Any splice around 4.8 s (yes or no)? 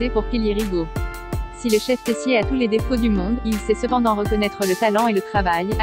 no